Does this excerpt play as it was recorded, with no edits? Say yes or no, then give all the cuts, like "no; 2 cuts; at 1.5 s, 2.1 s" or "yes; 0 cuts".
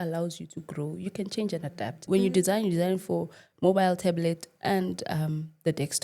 no; 1 cut; at 2.1 s